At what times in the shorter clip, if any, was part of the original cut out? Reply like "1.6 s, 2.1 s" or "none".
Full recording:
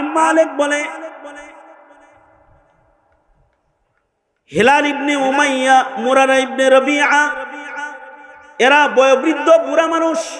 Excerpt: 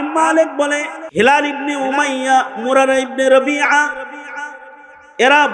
1.0 s